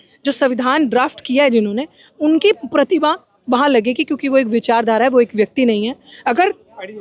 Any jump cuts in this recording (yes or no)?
no